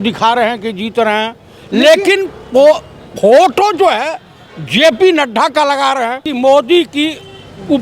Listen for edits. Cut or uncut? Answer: cut